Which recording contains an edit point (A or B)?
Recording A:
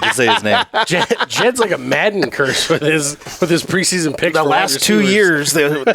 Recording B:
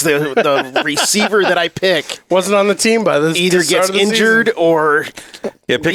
A